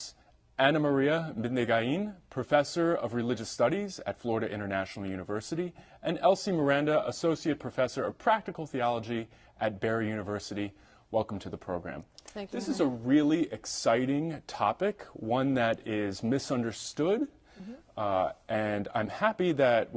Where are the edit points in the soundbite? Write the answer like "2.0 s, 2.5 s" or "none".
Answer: 3.7 s